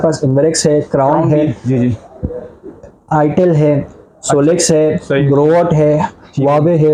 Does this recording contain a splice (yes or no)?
no